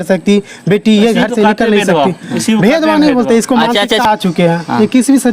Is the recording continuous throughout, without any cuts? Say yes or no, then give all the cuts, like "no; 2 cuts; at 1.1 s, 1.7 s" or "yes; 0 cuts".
no; 1 cut; at 4.0 s